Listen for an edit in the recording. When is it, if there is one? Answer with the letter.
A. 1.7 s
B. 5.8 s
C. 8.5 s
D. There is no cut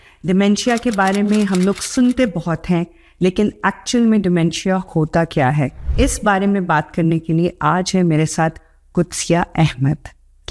B